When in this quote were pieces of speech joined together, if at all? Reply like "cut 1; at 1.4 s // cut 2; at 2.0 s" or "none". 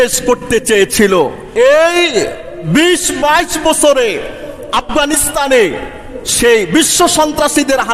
cut 1; at 1.4 s